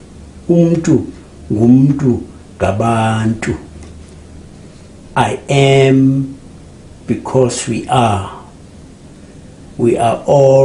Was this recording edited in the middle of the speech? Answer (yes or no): no